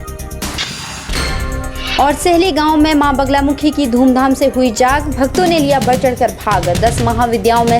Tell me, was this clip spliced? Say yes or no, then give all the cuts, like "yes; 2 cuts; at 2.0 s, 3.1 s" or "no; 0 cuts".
yes; 1 cut; at 1.7 s